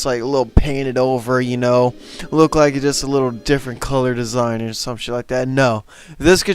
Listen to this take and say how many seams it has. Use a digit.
1